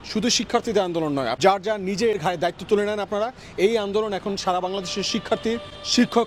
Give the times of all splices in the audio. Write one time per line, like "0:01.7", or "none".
0:01.3
0:02.2